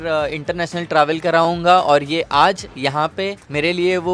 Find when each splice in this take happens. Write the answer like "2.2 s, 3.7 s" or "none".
none